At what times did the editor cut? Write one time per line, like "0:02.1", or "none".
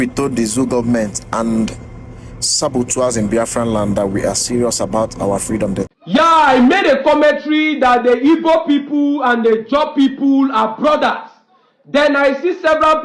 0:05.9